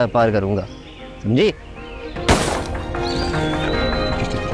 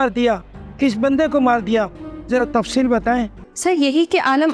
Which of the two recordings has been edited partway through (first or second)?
second